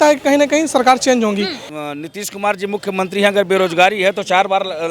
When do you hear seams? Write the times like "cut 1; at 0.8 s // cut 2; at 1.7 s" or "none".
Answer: cut 1; at 1.6 s